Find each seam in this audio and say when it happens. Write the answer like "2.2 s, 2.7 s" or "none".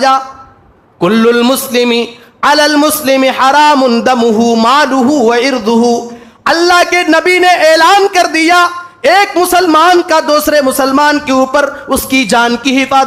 none